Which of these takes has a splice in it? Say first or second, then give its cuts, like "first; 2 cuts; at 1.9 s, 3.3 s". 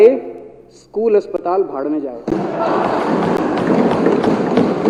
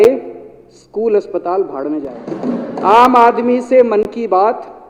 second; 1 cut; at 2.3 s